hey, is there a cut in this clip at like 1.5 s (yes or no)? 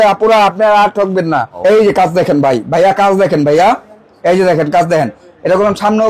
yes